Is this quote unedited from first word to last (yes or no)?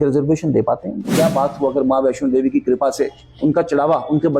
no